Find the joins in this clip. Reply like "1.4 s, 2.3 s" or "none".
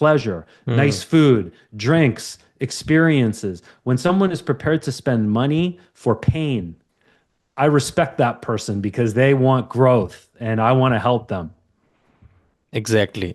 none